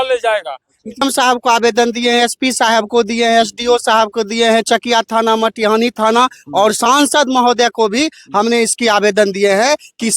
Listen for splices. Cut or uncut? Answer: cut